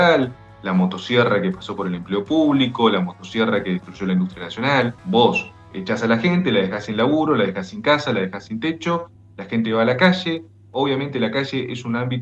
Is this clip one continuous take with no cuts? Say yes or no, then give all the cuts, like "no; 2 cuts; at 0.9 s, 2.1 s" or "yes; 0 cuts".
no; 1 cut; at 5.0 s